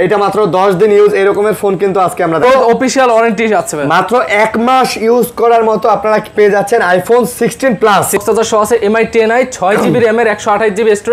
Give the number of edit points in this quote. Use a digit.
2